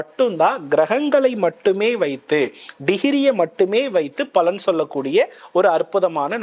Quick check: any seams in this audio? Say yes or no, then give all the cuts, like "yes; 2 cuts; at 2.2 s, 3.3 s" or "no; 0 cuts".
no; 0 cuts